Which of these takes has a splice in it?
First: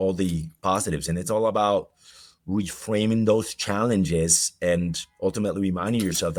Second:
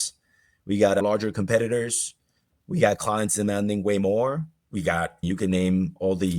second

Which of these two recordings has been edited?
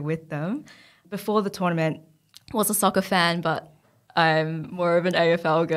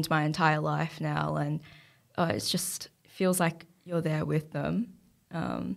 first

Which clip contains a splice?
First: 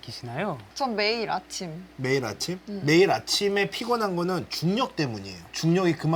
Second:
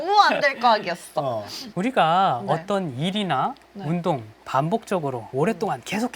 second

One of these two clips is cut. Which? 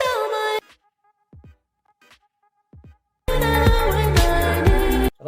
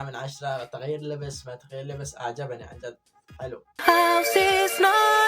second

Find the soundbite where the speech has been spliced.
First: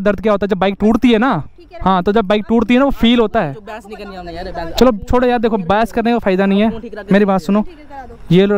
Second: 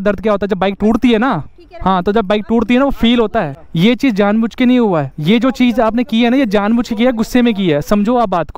second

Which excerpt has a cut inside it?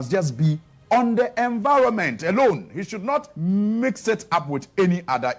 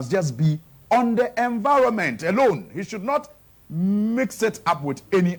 first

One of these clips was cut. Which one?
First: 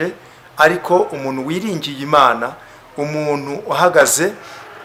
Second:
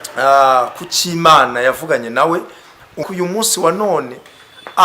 second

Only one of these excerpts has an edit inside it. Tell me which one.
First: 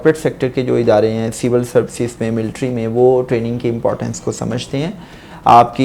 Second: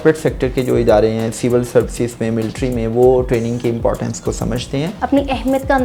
second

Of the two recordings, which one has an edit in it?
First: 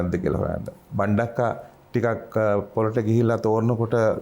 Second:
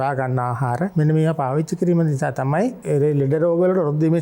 second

